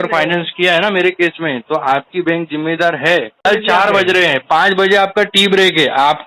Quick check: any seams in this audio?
yes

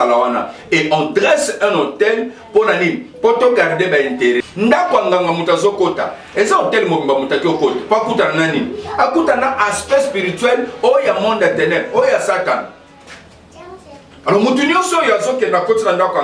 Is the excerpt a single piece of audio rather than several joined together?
no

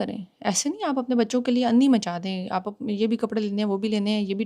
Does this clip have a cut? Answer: no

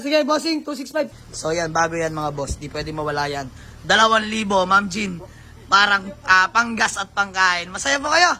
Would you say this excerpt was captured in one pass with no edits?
no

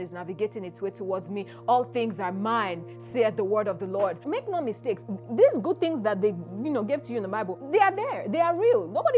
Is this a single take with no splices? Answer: no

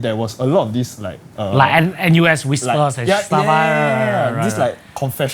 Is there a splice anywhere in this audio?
no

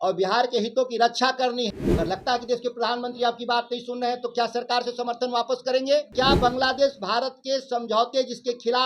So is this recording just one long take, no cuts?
no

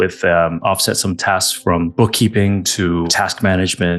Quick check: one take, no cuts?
no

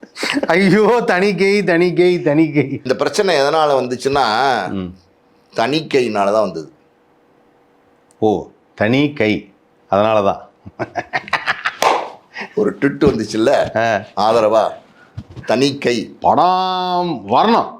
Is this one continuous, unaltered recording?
no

